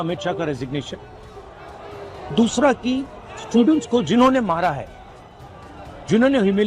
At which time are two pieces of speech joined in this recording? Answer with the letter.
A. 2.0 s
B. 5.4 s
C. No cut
C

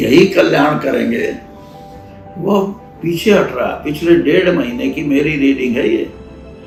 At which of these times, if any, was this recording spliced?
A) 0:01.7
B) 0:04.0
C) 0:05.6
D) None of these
D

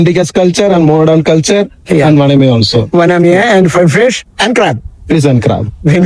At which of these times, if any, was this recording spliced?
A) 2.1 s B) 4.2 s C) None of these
C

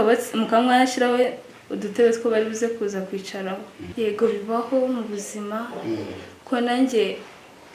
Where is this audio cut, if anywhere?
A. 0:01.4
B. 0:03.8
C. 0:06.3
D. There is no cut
B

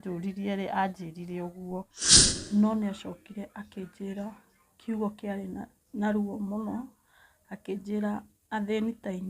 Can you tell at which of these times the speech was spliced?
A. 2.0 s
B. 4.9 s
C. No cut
A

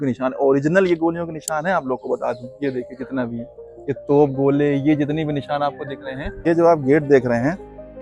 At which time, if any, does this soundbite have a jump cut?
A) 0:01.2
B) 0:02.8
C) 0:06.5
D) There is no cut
C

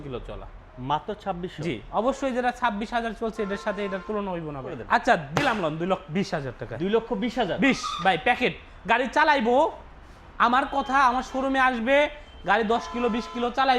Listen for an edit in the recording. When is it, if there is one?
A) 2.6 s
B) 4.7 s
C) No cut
B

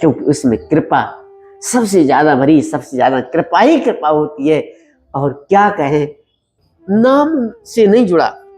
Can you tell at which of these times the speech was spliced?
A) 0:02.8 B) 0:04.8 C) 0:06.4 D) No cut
C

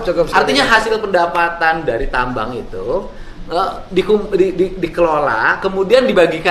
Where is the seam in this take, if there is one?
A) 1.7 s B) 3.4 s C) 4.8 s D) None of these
D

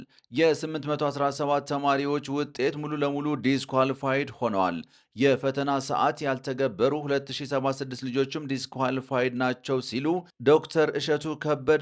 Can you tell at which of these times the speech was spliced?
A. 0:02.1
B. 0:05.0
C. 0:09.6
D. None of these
D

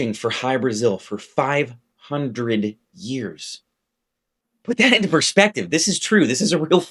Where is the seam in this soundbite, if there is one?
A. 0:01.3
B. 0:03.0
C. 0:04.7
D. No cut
C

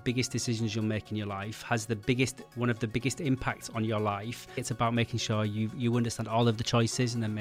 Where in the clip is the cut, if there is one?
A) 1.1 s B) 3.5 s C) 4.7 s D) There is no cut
C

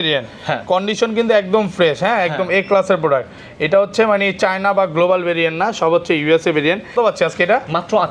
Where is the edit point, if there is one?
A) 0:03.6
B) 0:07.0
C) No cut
B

